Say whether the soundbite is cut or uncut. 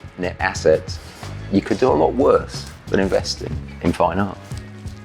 uncut